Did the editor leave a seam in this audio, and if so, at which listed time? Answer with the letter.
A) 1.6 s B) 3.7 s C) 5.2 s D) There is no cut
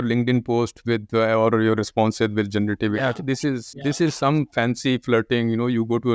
B